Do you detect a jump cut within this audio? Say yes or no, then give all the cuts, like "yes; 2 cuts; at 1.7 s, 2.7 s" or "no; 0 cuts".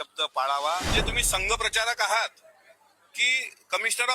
yes; 1 cut; at 0.9 s